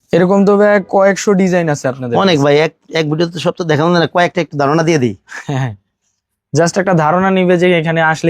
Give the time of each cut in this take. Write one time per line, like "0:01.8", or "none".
none